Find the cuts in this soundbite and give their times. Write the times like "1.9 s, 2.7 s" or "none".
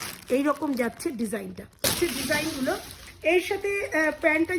1.9 s